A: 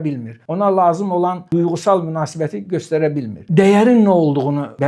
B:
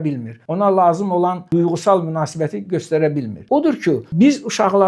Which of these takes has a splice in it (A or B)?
A